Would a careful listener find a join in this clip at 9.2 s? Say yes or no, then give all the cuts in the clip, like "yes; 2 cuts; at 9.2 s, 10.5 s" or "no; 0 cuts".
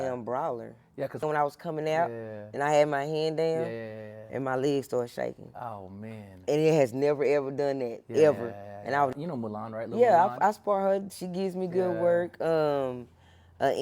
yes; 2 cuts; at 1.2 s, 9.2 s